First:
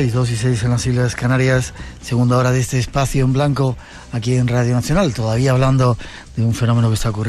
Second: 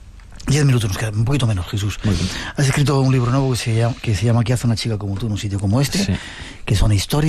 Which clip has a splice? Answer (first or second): second